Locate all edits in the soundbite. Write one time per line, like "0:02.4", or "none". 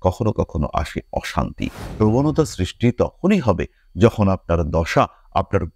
0:01.8